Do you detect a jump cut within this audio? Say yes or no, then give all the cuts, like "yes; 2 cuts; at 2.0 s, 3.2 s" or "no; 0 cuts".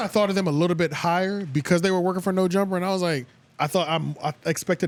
no; 0 cuts